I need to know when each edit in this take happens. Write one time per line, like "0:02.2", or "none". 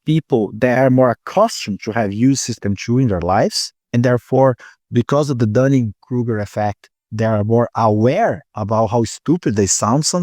none